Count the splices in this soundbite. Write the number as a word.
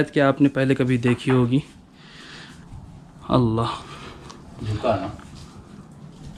zero